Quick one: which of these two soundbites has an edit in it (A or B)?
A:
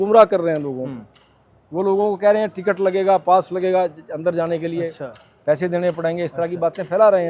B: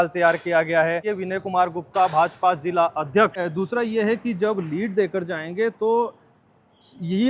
B